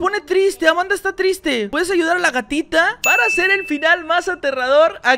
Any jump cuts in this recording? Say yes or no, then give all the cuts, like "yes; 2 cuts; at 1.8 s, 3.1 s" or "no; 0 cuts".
no; 0 cuts